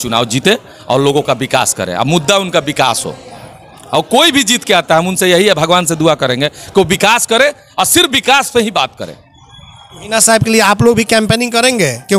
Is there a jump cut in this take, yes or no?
no